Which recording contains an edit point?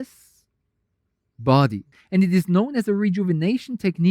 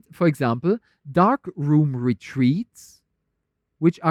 first; 1 cut; at 1.9 s

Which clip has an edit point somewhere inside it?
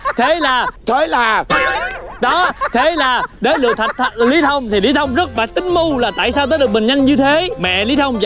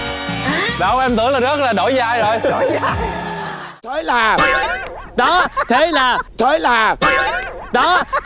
second; 1 cut; at 3.8 s

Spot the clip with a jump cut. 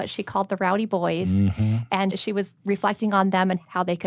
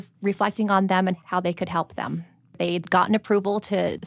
second; 1 cut; at 2.6 s

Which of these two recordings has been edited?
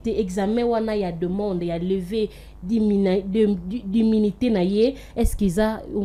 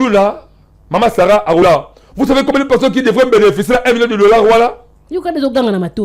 second; 1 cut; at 1.6 s

